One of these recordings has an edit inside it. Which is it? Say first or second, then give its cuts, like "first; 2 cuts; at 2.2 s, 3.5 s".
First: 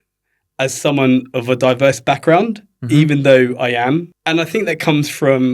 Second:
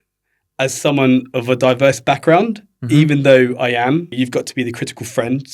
second; 1 cut; at 4.1 s